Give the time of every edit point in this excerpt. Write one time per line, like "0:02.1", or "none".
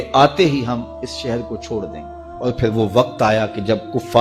none

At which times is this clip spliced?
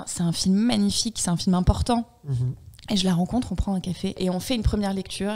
0:04.2

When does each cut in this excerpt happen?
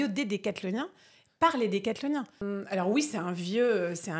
0:02.4

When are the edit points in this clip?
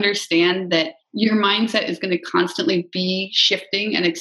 0:01.0
0:01.7

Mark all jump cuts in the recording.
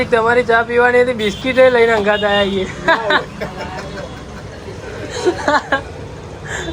none

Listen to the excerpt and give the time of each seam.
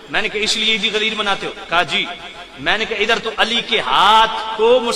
none

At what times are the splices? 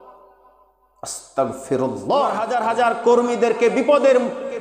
0:02.4

